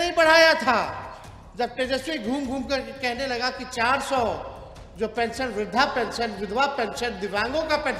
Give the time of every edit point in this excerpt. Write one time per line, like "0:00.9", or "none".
none